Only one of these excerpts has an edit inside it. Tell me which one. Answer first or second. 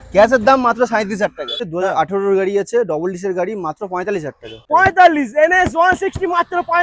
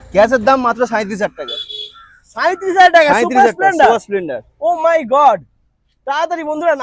first